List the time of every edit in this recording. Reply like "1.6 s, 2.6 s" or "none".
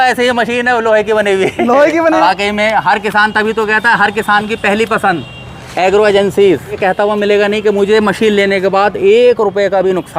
2.2 s, 6.7 s